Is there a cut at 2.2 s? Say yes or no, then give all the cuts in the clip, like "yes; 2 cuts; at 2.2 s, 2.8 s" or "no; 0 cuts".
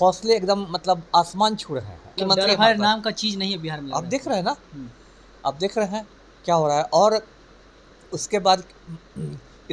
yes; 1 cut; at 2.2 s